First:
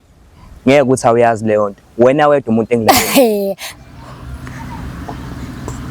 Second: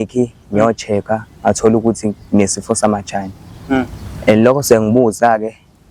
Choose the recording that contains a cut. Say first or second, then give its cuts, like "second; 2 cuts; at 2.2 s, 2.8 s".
first; 1 cut; at 3.7 s